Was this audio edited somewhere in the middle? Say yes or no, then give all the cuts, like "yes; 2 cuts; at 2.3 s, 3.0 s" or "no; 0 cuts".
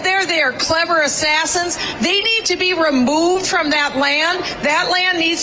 no; 0 cuts